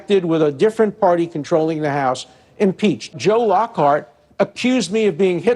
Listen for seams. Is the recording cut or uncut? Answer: cut